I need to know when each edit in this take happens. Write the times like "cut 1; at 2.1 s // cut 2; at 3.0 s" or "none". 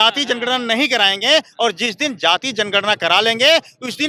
none